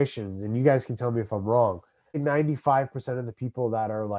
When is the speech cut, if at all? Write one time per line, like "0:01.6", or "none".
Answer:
0:02.2